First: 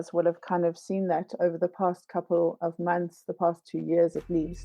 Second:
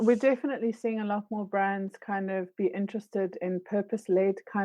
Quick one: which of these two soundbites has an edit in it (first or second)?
first